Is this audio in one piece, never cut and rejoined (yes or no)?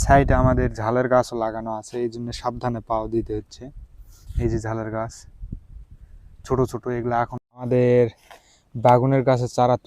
no